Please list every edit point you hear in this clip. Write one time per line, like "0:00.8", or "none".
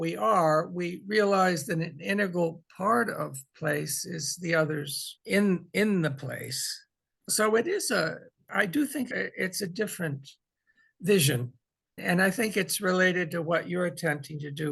0:05.0